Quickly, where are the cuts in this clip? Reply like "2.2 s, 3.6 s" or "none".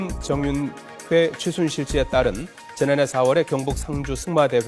1.5 s

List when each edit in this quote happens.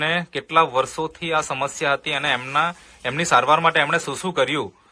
none

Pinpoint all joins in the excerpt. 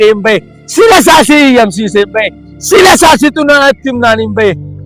none

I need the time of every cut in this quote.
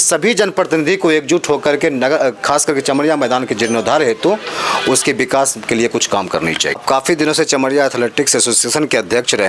6.7 s

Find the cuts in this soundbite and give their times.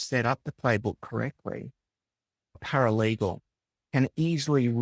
none

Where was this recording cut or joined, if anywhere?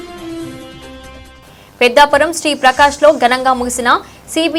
none

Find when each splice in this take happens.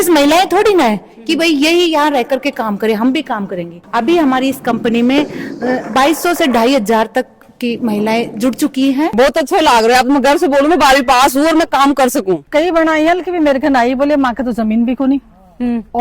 3.8 s, 9.1 s, 12.4 s

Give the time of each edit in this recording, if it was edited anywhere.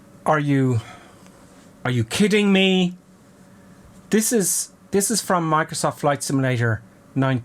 none

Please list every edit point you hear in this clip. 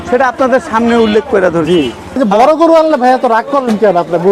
2.2 s

